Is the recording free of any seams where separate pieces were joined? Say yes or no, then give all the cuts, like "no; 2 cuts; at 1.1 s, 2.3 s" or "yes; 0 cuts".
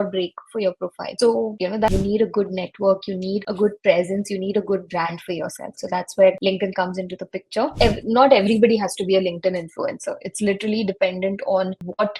no; 2 cuts; at 1.9 s, 7.7 s